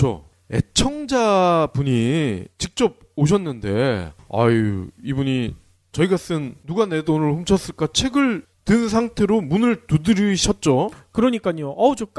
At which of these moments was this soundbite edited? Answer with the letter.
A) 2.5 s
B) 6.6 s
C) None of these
C